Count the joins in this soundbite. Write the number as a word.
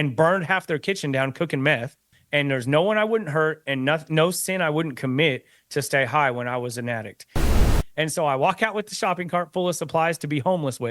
two